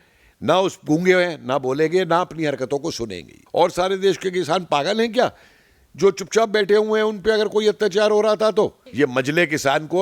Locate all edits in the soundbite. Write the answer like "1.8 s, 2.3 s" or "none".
3.4 s, 8.8 s